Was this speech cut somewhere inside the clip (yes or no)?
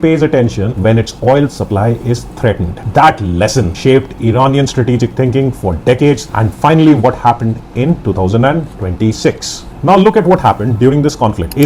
no